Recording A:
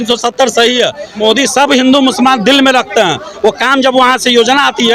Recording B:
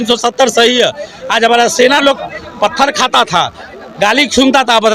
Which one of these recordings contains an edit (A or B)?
A